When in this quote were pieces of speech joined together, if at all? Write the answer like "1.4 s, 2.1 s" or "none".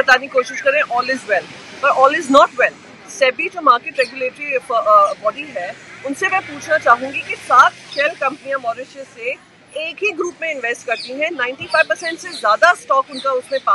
none